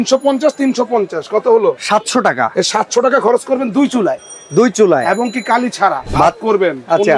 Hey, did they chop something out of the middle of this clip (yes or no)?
yes